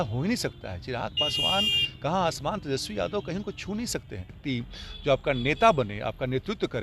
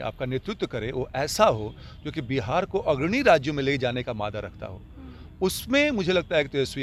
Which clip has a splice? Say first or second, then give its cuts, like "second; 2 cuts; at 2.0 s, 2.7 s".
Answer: first; 1 cut; at 4.4 s